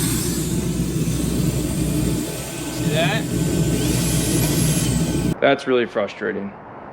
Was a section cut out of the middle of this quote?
yes; 1 cut; at 5.3 s

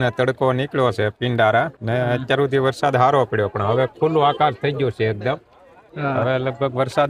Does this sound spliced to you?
yes; 1 cut; at 1.8 s

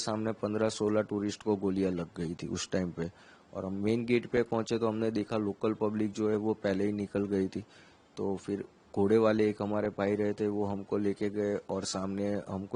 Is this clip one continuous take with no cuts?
yes; 0 cuts

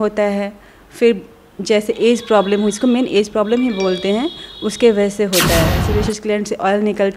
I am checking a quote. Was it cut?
yes; 1 cut; at 5.8 s

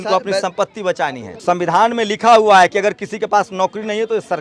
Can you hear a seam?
yes; 1 cut; at 1.3 s

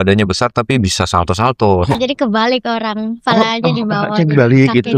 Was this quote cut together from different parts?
yes; 1 cut; at 2.0 s

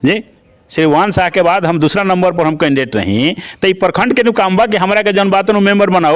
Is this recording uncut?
yes; 0 cuts

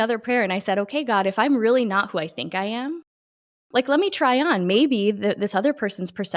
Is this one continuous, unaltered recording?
yes; 0 cuts

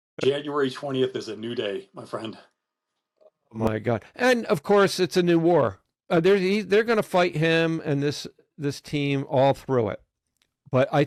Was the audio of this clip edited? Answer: no; 0 cuts

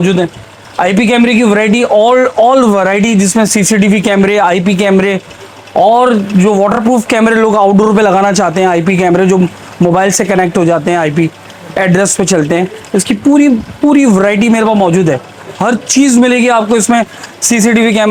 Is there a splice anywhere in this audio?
no; 0 cuts

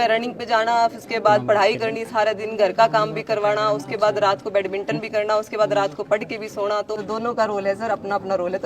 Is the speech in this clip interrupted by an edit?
yes; 1 cut; at 7.0 s

